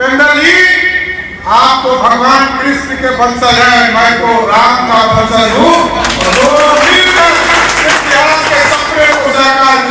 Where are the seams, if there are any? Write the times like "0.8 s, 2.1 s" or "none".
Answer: none